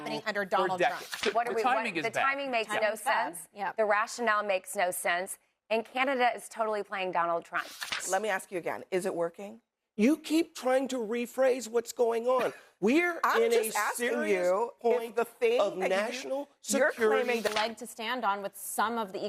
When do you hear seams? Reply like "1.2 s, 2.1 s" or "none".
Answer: 1.3 s, 8.0 s, 17.5 s